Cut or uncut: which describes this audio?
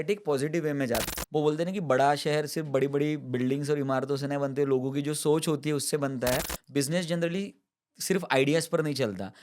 cut